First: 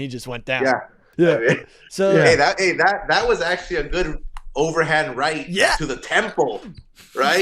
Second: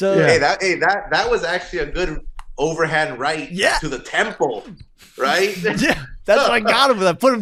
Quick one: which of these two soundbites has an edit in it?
first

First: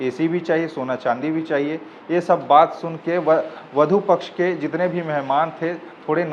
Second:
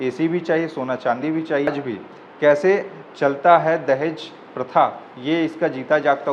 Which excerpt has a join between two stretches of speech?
second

